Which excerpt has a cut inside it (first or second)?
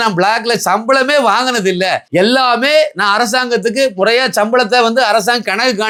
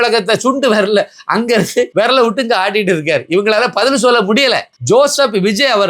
second